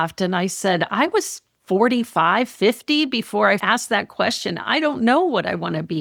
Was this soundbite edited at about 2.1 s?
no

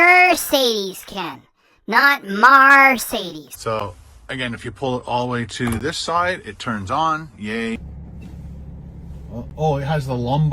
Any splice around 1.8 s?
no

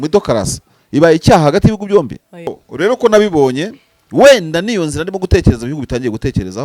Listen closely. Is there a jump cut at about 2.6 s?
yes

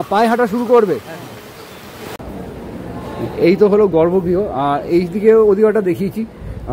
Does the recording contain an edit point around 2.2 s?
yes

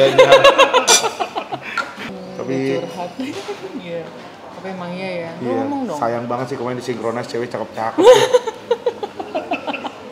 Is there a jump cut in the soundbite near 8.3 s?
no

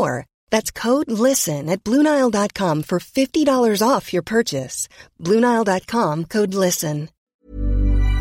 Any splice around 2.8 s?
no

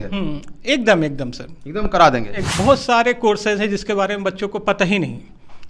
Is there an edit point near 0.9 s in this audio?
no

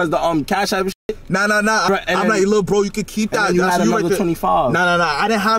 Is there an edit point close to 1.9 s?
yes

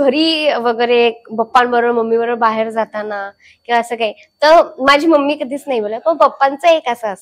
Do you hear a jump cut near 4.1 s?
no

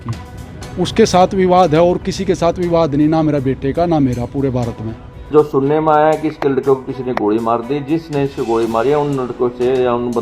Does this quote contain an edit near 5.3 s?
yes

